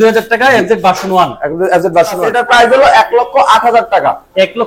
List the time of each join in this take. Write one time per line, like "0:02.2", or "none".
0:02.3

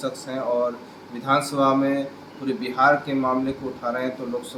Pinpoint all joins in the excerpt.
none

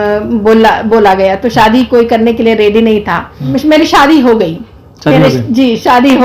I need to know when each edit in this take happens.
0:03.5

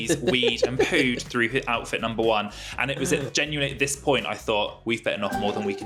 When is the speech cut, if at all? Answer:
none

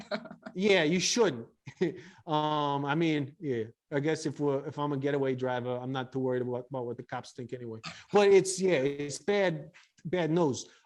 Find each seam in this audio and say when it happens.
none

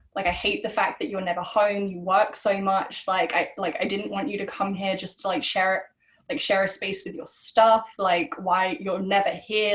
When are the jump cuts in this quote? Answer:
none

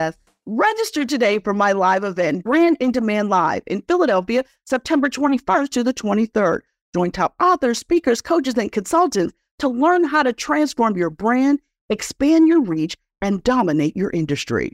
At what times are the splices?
none

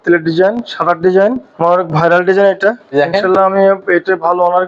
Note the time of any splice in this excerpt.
0:01.5
0:02.9

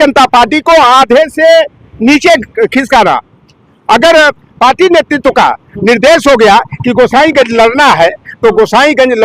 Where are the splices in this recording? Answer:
0:03.3

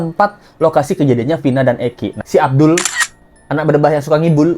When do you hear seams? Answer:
0:02.2

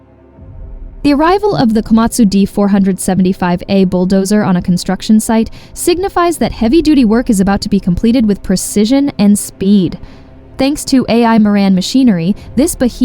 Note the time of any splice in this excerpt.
0:01.0

